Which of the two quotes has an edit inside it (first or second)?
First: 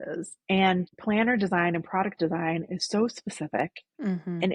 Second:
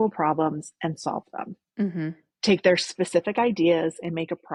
first